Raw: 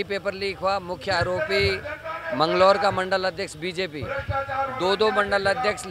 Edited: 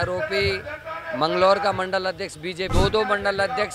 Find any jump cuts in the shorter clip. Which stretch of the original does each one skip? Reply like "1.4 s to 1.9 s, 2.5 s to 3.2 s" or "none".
3.9 s to 4.8 s